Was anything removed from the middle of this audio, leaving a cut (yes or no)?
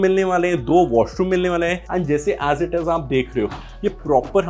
yes